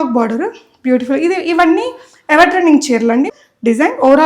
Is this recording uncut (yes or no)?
no